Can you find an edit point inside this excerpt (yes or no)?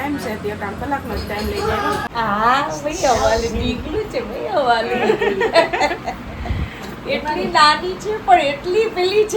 yes